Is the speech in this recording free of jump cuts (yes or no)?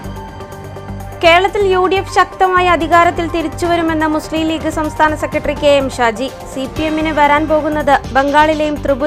yes